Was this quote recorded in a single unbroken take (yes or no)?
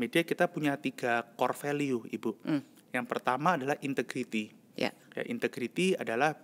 yes